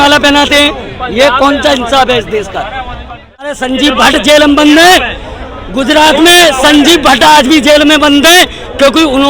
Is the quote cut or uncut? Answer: cut